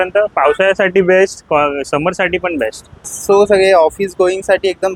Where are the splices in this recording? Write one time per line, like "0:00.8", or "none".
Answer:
0:03.2